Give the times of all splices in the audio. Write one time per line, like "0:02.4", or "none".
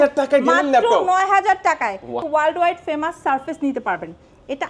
0:02.2

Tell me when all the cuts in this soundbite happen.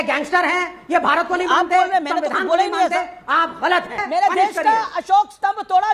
0:04.0

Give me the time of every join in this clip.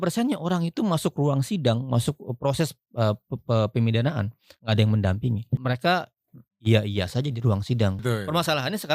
0:05.6
0:08.0

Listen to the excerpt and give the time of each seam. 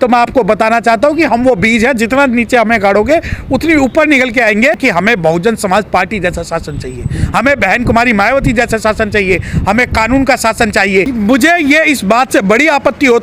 0:04.8
0:11.1

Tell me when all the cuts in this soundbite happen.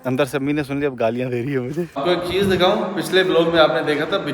0:02.0

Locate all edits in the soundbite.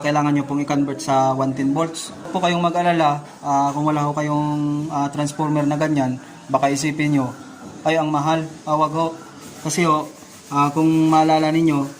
0:02.3

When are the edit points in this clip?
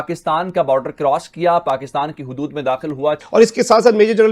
0:03.2

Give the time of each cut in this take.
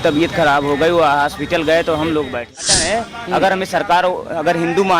0:02.7

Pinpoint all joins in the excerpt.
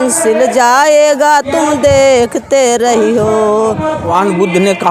0:04.0

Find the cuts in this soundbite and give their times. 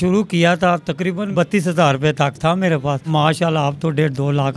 0:01.3
0:03.1

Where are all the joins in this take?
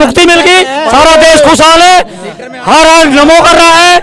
none

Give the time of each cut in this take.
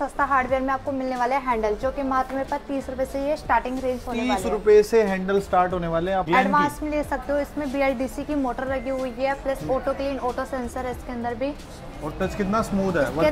0:06.3

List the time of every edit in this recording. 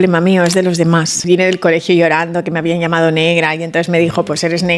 0:01.1

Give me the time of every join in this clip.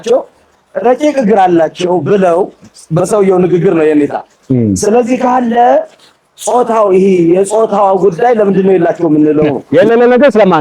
0:09.6

